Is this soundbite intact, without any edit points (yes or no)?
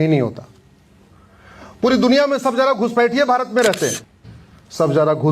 no